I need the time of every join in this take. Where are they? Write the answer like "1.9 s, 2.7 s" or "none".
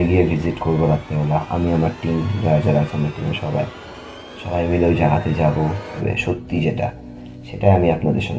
6.0 s